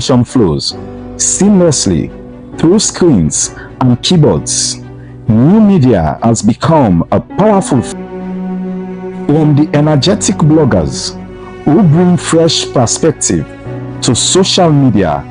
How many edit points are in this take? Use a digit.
1